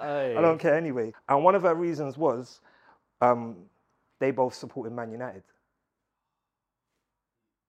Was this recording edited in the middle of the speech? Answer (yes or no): yes